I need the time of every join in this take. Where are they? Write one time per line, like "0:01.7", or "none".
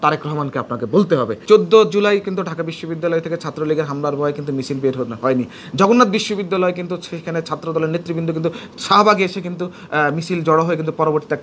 0:01.4